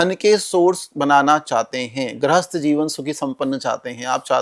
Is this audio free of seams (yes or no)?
yes